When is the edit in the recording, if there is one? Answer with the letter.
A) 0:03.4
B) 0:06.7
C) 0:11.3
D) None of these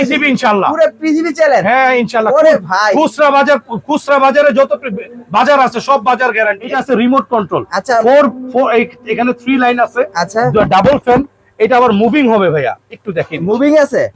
B